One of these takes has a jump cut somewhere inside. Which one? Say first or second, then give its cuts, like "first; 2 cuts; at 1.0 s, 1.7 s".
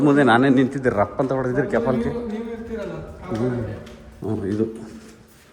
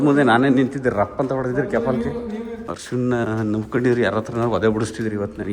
second; 1 cut; at 2.6 s